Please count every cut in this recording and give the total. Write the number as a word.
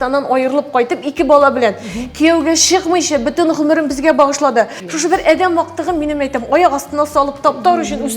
one